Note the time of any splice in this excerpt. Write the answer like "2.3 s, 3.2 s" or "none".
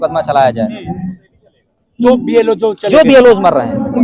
none